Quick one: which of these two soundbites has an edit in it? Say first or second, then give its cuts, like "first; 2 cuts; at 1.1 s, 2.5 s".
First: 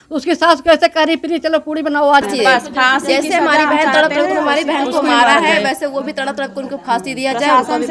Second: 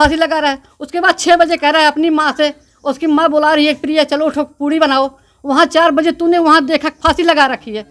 first; 1 cut; at 2.3 s